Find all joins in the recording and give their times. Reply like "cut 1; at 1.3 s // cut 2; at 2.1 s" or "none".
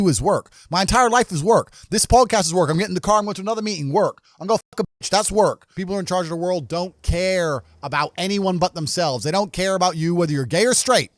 cut 1; at 5.7 s

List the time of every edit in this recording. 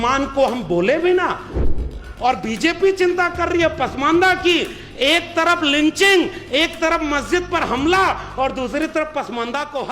cut 1; at 1.8 s

